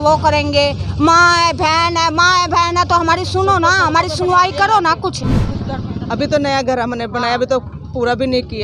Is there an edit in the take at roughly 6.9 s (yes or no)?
no